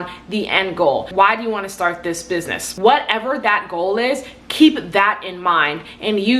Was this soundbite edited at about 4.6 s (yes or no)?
no